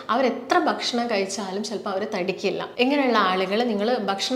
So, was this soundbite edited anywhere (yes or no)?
yes